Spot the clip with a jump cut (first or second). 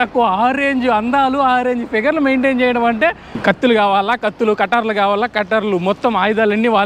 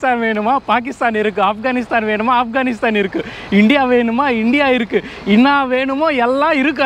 first